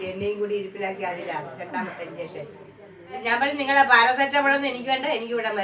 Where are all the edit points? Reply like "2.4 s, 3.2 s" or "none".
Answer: 3.2 s